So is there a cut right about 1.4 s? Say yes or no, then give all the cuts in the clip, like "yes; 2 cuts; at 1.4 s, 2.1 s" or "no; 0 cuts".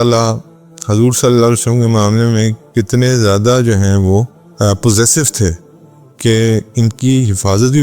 no; 1 cut; at 4.4 s